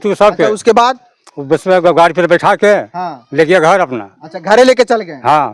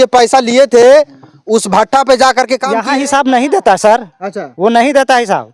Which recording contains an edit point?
second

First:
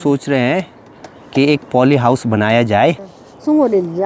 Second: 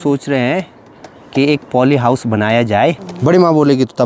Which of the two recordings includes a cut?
first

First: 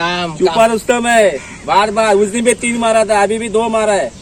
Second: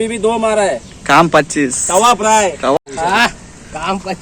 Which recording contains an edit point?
second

